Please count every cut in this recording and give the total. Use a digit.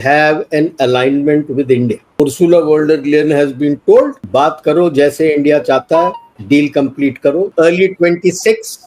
4